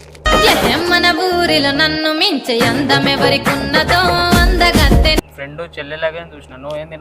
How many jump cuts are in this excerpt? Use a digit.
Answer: 1